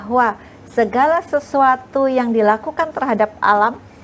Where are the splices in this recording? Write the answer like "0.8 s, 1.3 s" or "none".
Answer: none